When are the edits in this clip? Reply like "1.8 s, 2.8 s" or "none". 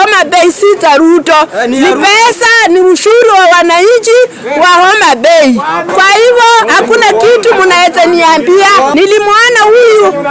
8.9 s